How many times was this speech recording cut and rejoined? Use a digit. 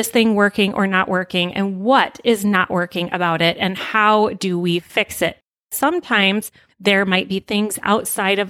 2